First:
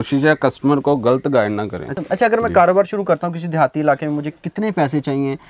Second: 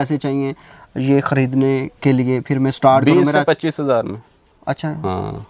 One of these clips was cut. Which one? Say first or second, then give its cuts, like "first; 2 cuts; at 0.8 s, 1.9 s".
first; 1 cut; at 1.9 s